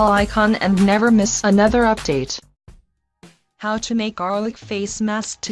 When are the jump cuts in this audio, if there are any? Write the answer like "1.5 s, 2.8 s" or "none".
none

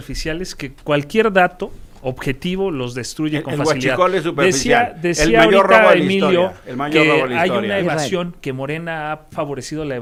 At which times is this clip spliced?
none

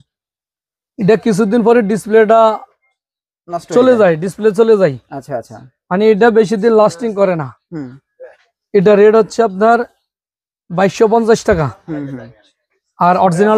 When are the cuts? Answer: none

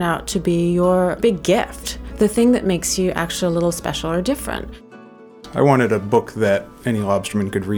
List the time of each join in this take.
1.2 s, 4.9 s

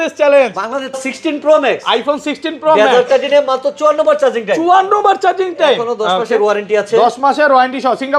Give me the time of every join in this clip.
1.0 s

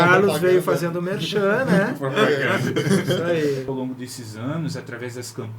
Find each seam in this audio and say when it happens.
3.7 s

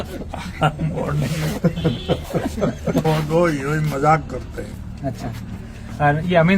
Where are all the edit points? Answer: 3.0 s

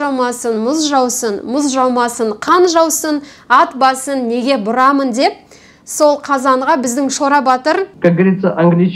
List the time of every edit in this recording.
7.9 s

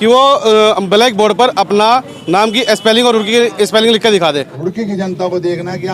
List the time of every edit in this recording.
4.5 s

